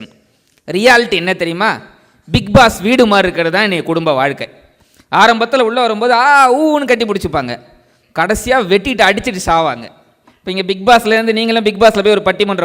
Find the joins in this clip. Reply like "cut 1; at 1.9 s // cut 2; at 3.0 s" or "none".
none